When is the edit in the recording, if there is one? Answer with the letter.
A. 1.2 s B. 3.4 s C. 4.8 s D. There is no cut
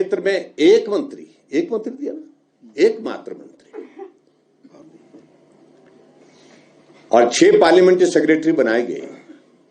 C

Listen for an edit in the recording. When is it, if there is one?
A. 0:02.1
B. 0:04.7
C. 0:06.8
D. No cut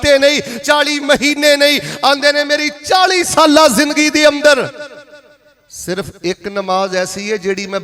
D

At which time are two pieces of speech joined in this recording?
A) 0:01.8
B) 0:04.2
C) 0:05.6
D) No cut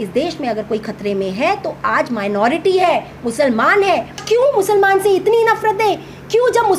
B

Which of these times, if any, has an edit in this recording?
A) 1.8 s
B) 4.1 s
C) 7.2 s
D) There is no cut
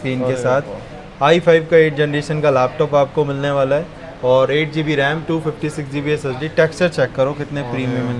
D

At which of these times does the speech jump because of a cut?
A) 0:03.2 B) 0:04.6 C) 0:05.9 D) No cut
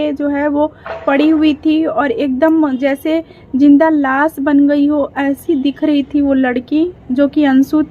D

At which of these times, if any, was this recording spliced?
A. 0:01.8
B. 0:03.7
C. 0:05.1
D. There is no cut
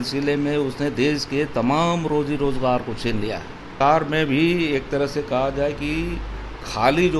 B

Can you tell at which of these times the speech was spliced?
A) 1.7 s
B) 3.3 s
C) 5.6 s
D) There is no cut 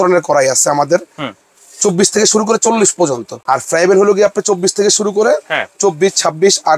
B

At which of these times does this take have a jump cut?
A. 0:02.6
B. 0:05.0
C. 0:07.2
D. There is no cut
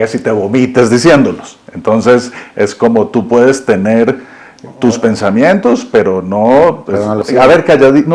C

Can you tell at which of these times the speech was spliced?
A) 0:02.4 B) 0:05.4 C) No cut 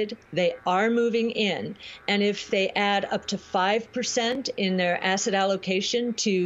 A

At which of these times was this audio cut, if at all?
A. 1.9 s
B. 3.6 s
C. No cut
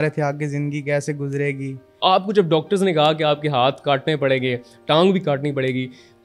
A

